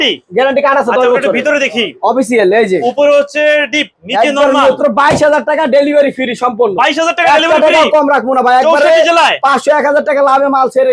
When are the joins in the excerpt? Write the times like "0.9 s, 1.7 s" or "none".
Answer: 4.8 s